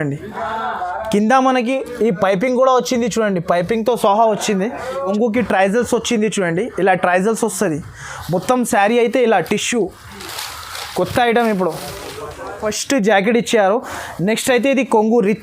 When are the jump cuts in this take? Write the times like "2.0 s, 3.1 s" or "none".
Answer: 5.1 s, 12.7 s